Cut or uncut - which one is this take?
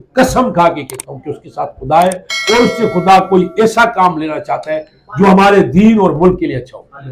uncut